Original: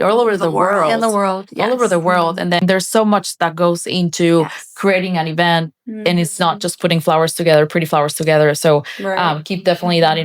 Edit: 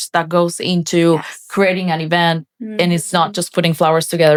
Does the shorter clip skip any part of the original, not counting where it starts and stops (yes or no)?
no